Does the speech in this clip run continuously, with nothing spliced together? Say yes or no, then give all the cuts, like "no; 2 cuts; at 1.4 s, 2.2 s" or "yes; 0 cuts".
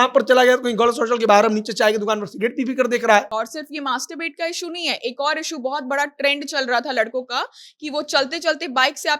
no; 1 cut; at 3.3 s